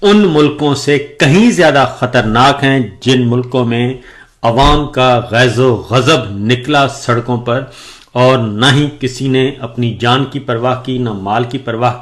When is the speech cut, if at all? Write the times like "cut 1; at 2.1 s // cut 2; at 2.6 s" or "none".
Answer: none